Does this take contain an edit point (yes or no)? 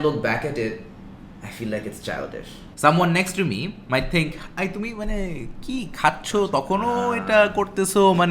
yes